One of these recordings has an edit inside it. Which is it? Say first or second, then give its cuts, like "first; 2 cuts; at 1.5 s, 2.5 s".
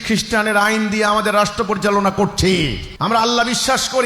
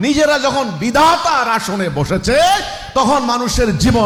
first; 1 cut; at 2.8 s